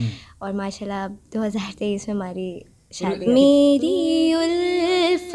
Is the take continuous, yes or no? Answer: no